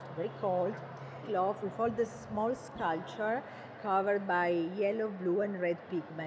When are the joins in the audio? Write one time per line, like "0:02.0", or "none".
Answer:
0:01.1